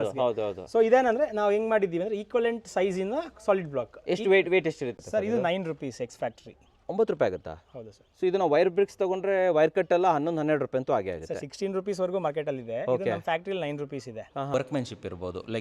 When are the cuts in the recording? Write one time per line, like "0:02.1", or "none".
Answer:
0:05.0
0:14.5